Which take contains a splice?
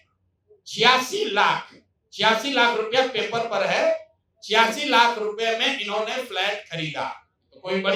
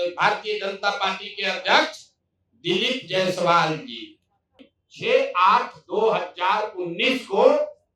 second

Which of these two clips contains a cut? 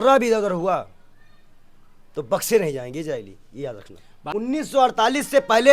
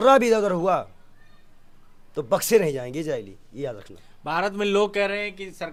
first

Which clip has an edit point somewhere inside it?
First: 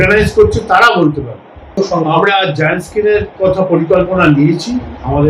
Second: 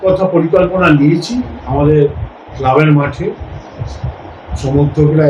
first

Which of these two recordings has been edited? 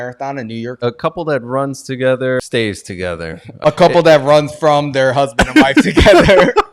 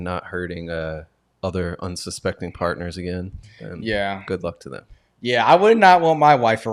first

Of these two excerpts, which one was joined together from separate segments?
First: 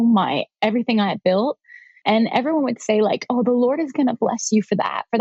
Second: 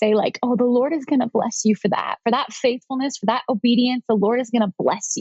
first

